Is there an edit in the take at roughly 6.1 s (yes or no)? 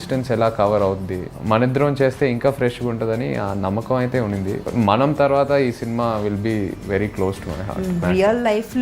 no